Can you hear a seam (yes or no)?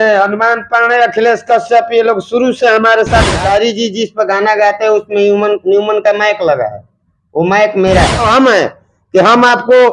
yes